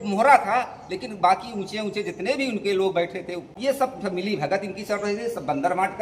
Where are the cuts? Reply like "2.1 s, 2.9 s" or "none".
3.5 s